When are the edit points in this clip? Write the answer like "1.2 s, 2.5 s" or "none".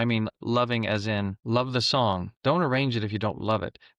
1.4 s, 2.3 s